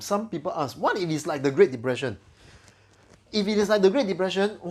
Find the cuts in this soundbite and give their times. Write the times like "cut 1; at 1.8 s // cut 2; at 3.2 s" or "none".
none